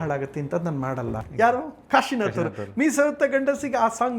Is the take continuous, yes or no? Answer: no